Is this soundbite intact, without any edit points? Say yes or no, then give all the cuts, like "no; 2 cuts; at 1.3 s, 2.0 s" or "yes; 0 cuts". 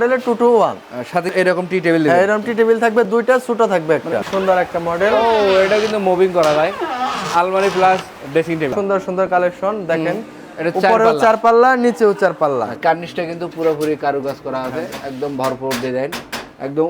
no; 4 cuts; at 1.3 s, 4.2 s, 8.7 s, 12.7 s